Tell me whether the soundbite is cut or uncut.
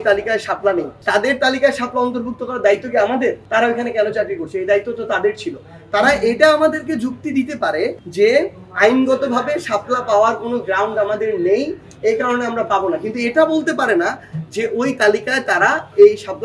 uncut